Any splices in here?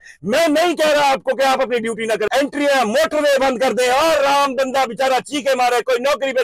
yes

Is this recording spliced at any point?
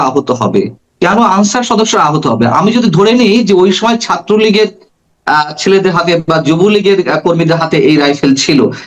no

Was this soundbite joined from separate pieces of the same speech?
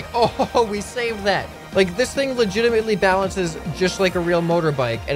yes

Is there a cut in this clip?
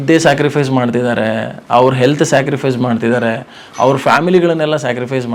no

